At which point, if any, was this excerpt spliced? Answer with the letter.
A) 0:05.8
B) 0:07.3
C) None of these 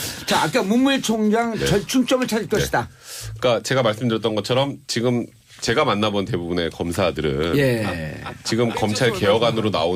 C